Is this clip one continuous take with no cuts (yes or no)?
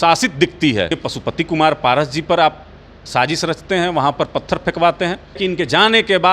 no